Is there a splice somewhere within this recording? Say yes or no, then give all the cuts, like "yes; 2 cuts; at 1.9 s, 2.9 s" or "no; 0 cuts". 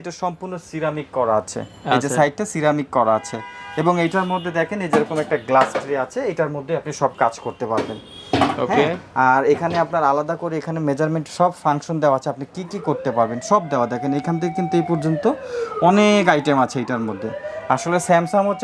no; 0 cuts